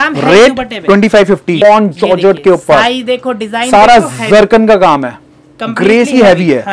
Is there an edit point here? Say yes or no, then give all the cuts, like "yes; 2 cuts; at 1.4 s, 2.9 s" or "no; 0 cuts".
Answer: yes; 1 cut; at 1.6 s